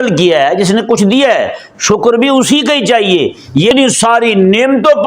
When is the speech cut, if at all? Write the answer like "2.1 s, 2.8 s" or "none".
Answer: 3.7 s